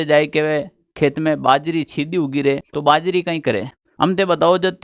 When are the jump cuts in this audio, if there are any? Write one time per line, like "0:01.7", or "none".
0:02.7
0:03.8

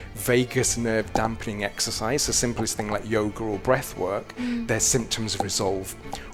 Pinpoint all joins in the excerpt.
none

